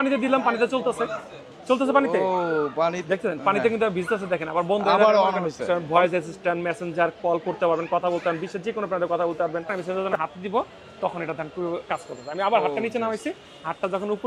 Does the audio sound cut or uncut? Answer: cut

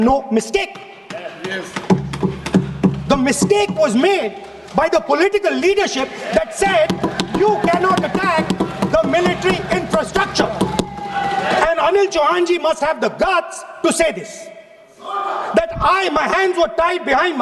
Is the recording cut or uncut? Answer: uncut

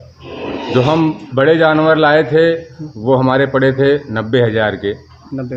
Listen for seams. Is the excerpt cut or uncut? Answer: uncut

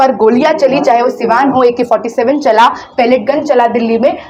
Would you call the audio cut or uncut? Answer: uncut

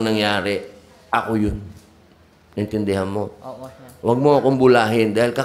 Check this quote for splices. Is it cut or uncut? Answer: uncut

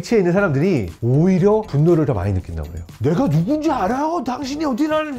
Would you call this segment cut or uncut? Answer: cut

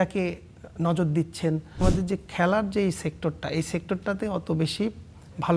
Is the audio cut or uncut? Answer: cut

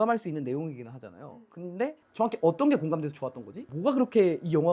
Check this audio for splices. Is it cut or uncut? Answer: cut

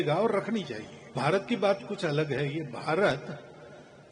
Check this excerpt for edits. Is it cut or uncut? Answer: cut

